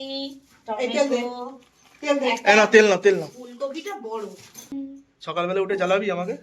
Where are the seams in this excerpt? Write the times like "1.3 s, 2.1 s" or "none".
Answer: 4.7 s